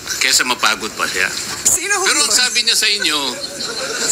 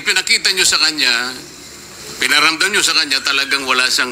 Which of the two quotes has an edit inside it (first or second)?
first